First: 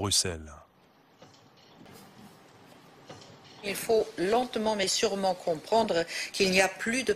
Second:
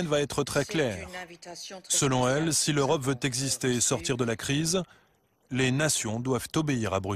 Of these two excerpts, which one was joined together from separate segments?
first; 1 cut; at 1.9 s

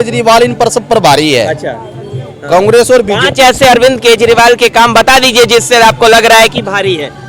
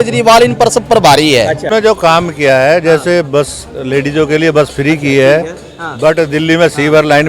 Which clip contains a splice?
second; 1 cut; at 1.7 s

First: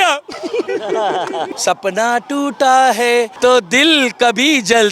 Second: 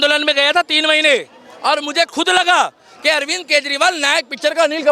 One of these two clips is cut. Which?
first; 2 cuts; at 1.5 s, 3.3 s

